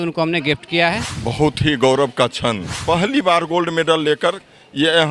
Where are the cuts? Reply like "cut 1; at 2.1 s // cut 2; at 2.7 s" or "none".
cut 1; at 1.1 s // cut 2; at 2.7 s